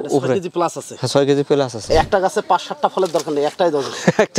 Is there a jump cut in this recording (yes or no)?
yes